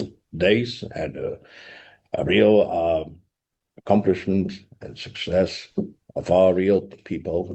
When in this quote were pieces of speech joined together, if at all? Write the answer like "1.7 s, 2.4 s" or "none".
none